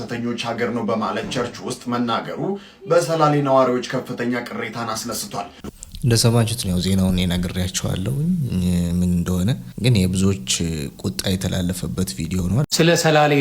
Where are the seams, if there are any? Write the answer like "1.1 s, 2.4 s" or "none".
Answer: 5.6 s, 9.7 s, 12.7 s